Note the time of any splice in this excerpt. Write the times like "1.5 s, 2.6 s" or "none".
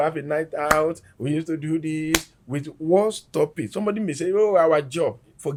none